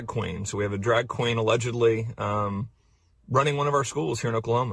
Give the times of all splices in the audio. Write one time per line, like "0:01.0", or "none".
0:02.8